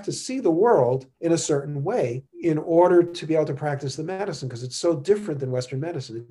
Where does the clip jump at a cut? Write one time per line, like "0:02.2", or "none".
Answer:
0:01.1
0:02.3